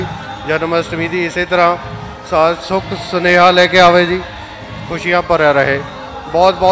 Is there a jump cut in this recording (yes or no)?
no